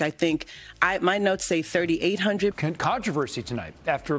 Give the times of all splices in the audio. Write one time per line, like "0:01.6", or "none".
0:02.5